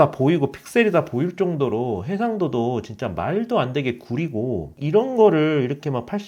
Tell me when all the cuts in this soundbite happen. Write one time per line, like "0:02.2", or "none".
0:04.7